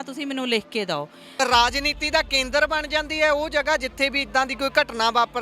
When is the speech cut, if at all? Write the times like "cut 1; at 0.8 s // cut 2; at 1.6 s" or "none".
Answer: cut 1; at 1.3 s